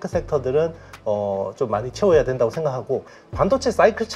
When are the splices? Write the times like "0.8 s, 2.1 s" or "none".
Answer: 3.2 s